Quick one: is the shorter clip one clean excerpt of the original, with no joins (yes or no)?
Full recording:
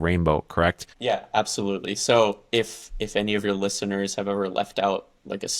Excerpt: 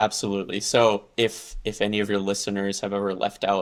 yes